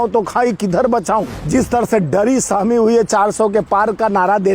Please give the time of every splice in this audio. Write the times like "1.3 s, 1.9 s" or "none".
1.4 s